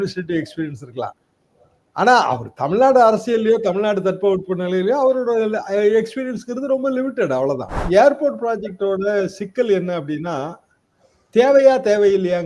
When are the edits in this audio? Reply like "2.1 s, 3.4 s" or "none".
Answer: 7.7 s